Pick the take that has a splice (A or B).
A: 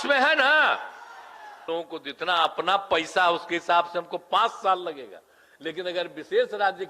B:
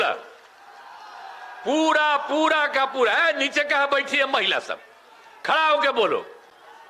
A